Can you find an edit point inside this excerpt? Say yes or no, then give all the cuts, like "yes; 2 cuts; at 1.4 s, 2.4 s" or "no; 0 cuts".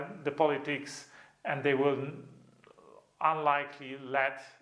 no; 0 cuts